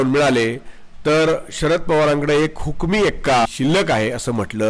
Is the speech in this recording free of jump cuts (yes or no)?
no